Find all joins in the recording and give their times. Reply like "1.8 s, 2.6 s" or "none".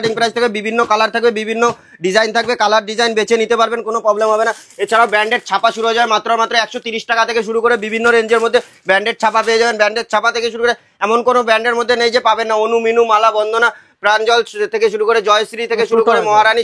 none